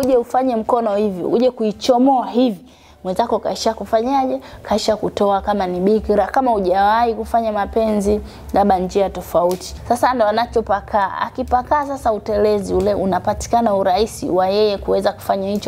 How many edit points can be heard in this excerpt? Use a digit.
1